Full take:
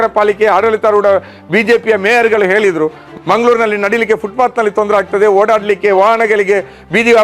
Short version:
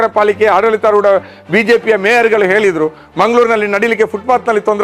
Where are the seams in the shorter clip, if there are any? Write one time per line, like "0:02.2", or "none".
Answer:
0:03.0